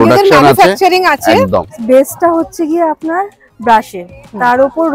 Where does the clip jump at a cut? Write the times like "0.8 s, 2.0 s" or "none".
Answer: 1.7 s

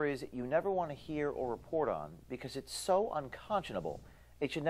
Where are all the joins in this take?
3.0 s

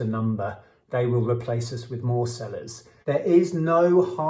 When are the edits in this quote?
2.9 s

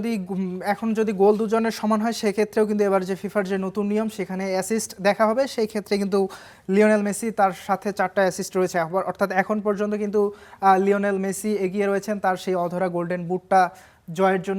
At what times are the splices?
none

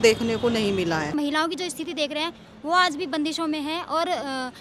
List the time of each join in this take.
1.1 s

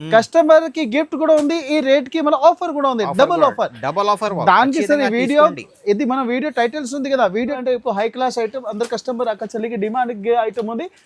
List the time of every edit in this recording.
7.6 s

